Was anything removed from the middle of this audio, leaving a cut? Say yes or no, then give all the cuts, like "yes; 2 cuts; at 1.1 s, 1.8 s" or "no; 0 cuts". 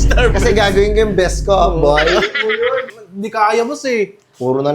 yes; 1 cut; at 2.8 s